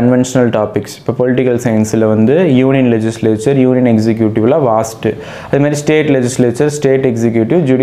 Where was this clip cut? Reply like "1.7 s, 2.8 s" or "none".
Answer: none